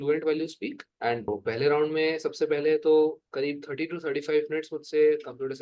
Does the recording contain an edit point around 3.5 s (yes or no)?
no